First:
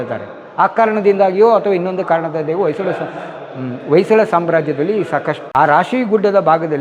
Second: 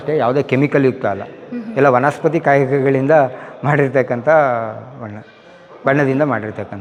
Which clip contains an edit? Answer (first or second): first